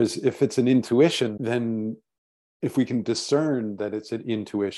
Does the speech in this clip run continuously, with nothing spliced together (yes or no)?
no